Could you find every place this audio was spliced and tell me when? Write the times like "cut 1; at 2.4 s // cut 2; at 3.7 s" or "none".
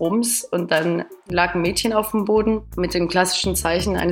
cut 1; at 1.2 s // cut 2; at 2.7 s